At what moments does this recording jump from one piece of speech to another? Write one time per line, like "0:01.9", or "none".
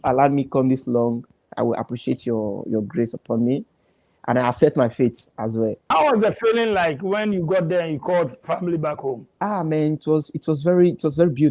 0:05.9